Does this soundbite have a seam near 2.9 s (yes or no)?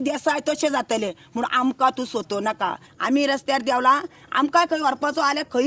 yes